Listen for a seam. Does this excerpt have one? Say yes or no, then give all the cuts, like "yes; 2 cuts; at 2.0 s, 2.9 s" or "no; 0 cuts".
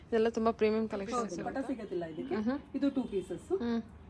yes; 1 cut; at 1.3 s